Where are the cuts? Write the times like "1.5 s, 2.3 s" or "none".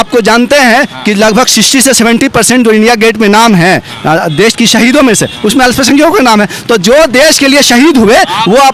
none